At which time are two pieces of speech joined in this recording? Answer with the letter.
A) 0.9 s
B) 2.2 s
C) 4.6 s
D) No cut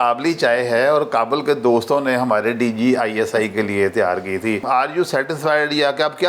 C